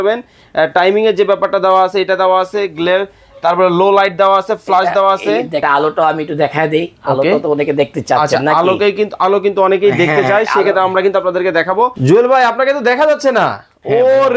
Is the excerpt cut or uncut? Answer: cut